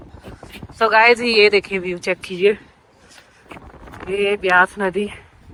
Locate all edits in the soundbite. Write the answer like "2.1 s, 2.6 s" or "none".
none